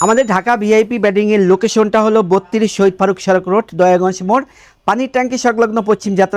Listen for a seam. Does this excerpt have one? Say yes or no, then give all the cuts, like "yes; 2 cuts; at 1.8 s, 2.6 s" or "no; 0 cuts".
no; 0 cuts